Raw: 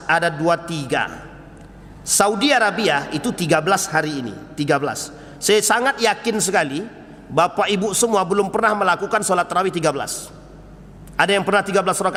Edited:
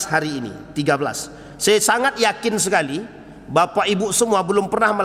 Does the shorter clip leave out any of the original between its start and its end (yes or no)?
no